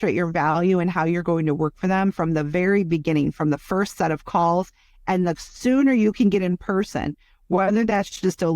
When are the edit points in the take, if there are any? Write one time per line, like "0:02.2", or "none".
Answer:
none